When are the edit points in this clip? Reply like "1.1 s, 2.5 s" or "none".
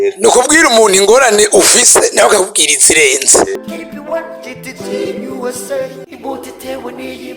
3.6 s